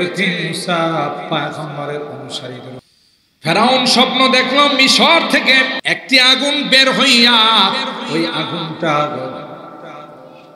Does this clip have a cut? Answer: yes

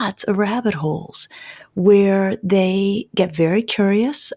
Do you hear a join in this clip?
no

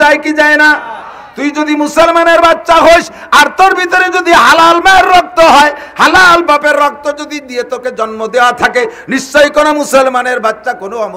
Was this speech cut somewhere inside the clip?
no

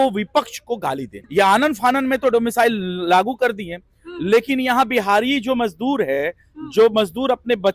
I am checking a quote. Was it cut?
yes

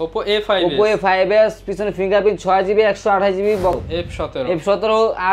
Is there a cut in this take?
yes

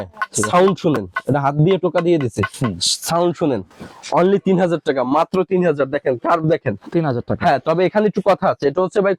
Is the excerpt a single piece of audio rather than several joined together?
yes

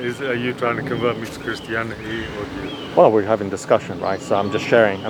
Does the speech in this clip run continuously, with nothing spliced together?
yes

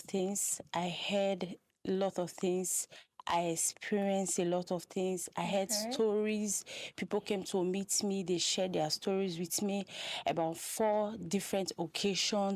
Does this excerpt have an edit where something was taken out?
no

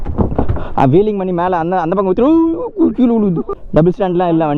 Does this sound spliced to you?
yes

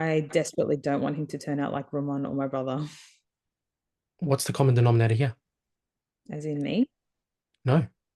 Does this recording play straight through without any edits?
yes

